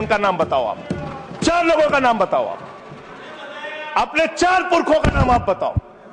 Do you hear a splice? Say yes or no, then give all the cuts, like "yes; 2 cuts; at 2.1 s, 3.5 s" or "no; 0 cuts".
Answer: no; 0 cuts